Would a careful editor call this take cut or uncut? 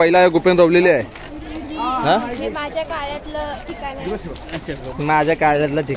uncut